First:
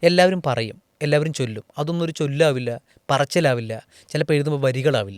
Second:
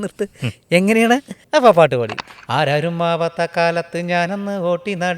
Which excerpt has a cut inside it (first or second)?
second